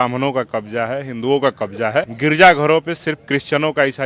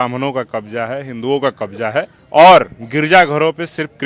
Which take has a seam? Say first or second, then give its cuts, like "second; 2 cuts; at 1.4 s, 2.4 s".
first; 1 cut; at 2.1 s